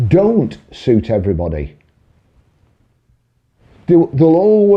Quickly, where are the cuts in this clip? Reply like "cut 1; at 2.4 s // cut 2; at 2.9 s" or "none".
none